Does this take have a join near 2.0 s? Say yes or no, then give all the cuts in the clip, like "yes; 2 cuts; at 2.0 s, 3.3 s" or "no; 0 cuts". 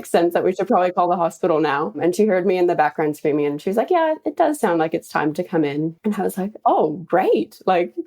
yes; 2 cuts; at 2.0 s, 6.1 s